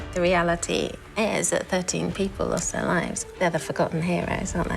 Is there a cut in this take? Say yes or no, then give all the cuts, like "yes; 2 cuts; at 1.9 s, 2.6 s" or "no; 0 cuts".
yes; 1 cut; at 3.2 s